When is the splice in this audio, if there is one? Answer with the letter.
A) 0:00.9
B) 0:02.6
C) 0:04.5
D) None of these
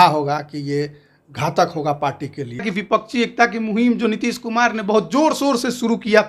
B